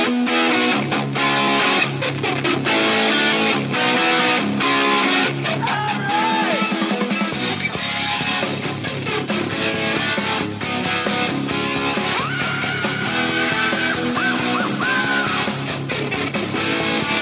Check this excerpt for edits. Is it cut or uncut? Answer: cut